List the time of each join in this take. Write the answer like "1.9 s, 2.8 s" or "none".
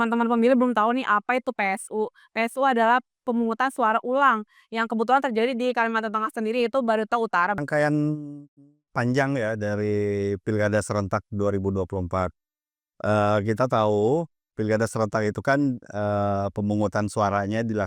7.6 s

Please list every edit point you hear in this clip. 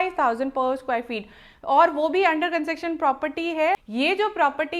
3.8 s

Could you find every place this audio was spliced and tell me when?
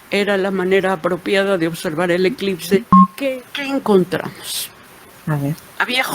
3.0 s

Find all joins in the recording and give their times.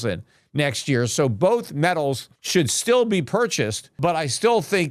2.3 s, 4.0 s

